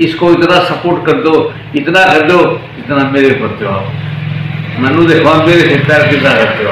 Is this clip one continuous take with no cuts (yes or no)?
yes